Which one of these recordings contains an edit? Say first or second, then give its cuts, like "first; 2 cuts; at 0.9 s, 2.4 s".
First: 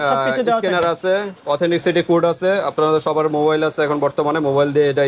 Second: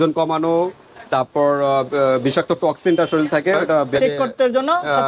second; 1 cut; at 3.9 s